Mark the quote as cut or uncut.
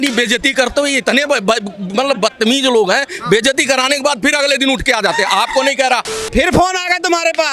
cut